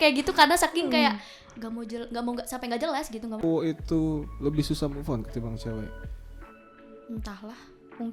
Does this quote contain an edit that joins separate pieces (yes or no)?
yes